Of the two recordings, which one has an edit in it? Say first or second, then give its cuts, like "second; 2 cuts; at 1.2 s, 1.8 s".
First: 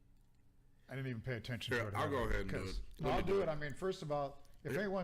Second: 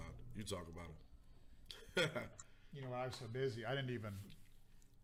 first; 1 cut; at 2.5 s